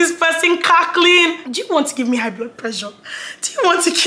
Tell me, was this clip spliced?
yes; 1 cut; at 1.5 s

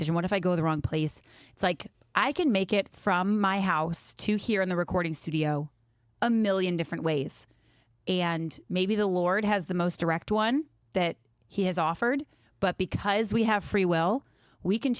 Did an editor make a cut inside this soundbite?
no; 0 cuts

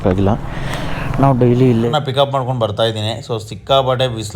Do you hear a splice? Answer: yes; 1 cut; at 1.9 s

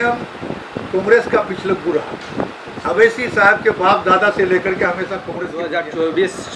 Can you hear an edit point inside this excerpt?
yes; 1 cut; at 5.5 s

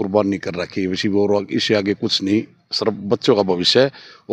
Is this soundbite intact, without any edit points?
yes; 0 cuts

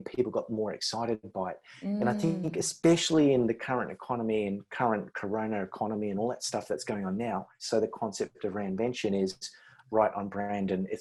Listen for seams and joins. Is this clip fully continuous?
no; 1 cut; at 7.5 s

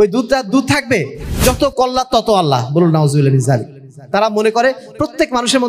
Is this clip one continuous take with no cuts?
no; 1 cut; at 1.3 s

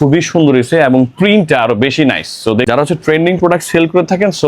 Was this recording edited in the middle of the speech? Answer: yes; 1 cut; at 2.7 s

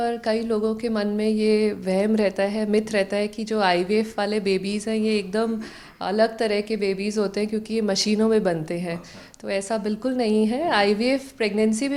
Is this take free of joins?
yes; 0 cuts

